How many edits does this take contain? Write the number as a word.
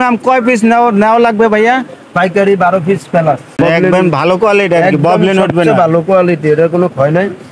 one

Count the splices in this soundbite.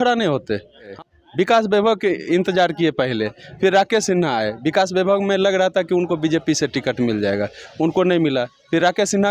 one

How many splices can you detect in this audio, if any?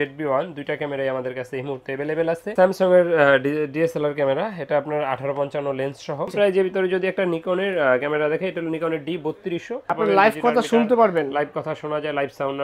three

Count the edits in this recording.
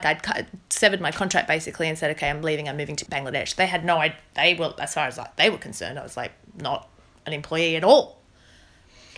one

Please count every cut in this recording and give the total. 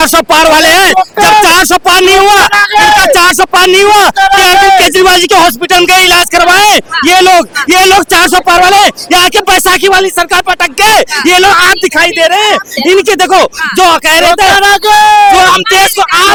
zero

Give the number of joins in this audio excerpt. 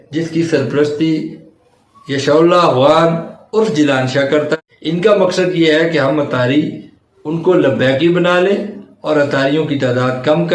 one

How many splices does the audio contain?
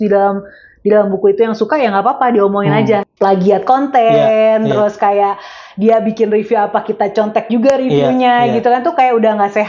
one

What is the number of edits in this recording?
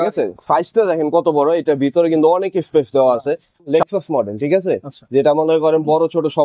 one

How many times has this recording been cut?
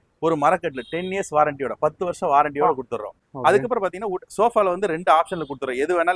one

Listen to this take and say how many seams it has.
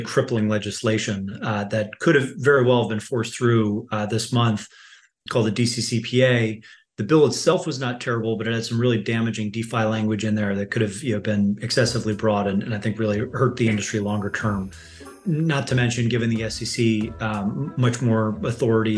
one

